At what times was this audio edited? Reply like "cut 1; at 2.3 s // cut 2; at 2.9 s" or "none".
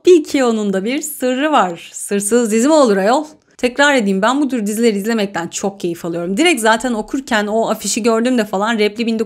none